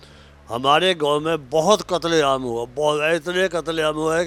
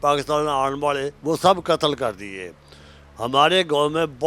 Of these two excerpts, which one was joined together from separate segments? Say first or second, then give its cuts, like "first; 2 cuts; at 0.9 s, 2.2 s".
second; 1 cut; at 1.1 s